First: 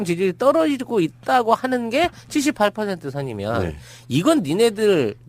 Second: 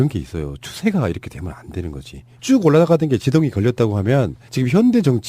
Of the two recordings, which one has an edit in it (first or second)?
second